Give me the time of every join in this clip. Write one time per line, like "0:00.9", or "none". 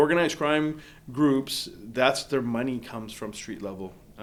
none